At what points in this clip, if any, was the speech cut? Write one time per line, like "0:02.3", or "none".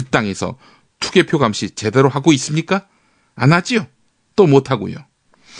0:01.9